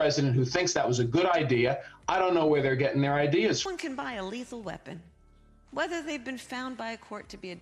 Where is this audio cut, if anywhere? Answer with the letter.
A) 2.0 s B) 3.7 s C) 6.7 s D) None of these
B